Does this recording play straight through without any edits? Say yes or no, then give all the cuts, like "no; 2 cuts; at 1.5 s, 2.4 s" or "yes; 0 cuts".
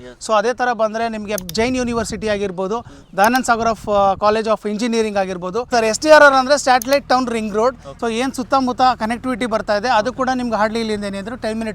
no; 2 cuts; at 5.7 s, 7.9 s